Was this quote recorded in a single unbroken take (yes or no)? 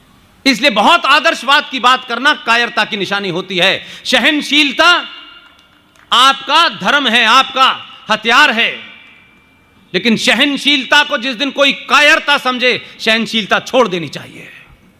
yes